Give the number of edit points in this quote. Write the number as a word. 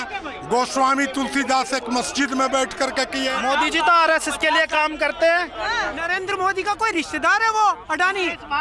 two